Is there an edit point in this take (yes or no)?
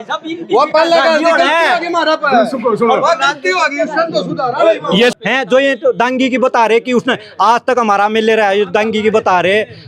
yes